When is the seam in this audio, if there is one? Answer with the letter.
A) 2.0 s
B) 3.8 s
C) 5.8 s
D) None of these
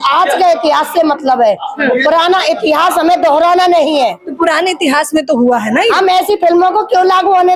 D